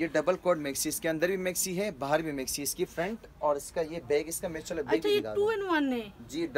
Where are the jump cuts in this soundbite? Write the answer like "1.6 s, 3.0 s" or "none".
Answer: none